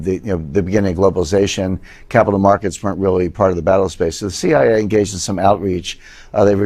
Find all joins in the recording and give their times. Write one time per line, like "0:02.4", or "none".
none